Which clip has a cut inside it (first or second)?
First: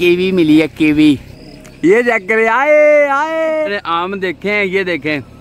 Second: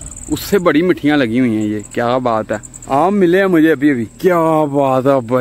first